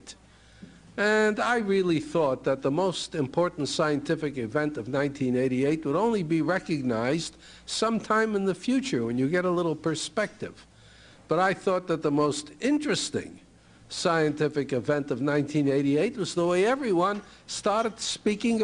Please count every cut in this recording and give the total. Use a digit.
1